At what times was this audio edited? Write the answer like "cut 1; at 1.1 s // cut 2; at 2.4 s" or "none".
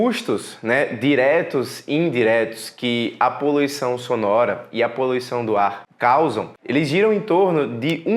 cut 1; at 5.9 s // cut 2; at 6.5 s